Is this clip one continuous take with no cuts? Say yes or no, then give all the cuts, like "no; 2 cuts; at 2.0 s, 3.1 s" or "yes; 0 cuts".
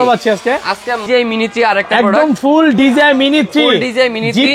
no; 1 cut; at 1.0 s